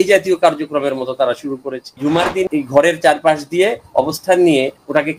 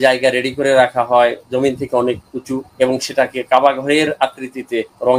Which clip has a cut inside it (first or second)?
first